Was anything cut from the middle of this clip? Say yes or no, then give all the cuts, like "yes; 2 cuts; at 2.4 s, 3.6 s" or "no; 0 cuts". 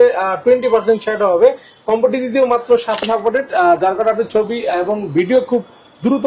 yes; 1 cut; at 3.0 s